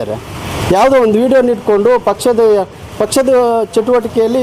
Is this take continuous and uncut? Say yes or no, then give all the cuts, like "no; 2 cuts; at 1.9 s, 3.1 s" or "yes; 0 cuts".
yes; 0 cuts